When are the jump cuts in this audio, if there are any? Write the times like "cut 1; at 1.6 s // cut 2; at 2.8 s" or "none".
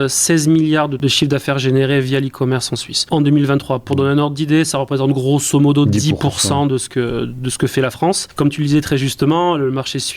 cut 1; at 1.0 s // cut 2; at 3.0 s // cut 3; at 8.3 s